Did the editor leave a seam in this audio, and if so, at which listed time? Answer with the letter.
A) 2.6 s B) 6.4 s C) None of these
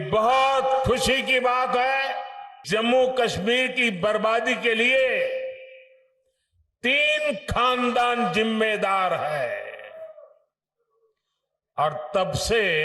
A